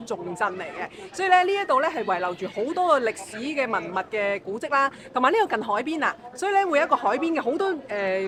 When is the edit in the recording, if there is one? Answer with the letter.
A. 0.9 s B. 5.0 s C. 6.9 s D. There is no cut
D